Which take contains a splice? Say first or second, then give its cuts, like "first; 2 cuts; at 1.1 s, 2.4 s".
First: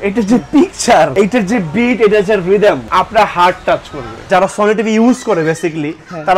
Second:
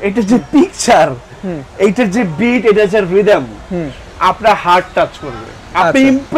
first; 3 cuts; at 1.1 s, 2.8 s, 4.3 s